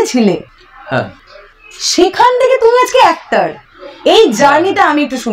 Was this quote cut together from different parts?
no; 0 cuts

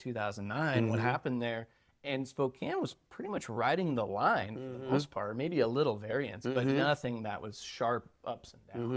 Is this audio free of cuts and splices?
yes; 0 cuts

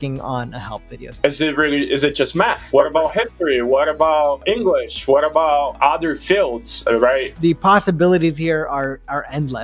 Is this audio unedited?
no; 5 cuts; at 1.0 s, 2.6 s, 4.4 s, 5.8 s, 7.3 s

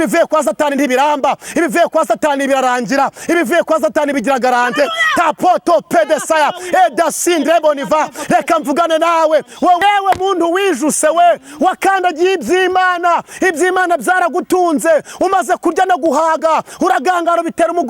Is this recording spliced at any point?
yes; 1 cut; at 9.8 s

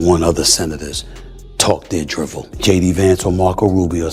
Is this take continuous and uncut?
no; 1 cut; at 2.5 s

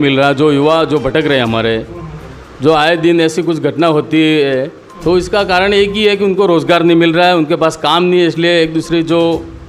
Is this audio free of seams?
yes; 0 cuts

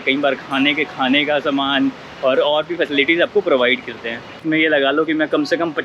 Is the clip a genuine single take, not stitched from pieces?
no; 1 cut; at 4.4 s

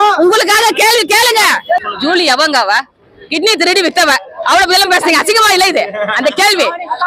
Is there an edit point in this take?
yes; 1 cut; at 1.8 s

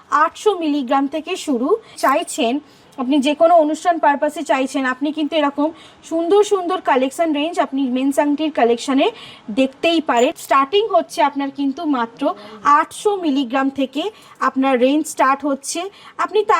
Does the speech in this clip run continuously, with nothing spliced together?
no; 2 cuts; at 1.9 s, 10.4 s

